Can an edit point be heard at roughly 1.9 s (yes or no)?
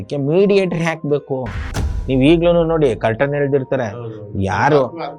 yes